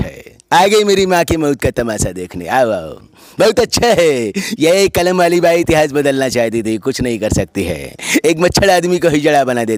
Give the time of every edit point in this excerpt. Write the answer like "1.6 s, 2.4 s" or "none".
none